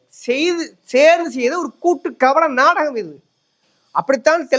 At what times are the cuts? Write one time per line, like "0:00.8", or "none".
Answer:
none